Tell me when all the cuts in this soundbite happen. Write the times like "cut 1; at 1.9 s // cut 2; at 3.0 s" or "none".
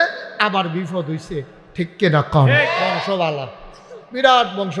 cut 1; at 2.9 s